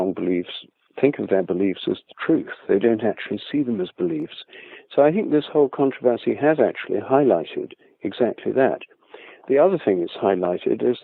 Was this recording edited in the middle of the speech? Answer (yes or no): no